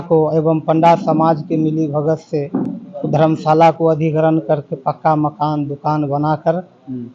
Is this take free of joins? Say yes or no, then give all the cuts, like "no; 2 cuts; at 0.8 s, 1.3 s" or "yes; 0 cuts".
yes; 0 cuts